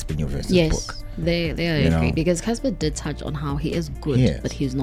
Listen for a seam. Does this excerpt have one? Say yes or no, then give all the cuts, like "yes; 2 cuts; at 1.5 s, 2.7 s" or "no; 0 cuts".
no; 0 cuts